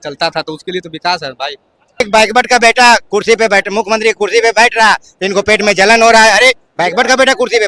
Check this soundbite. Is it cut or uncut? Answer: cut